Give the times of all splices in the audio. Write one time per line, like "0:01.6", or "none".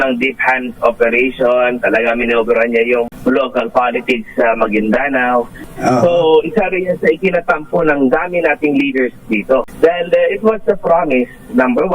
0:03.1
0:05.6
0:09.7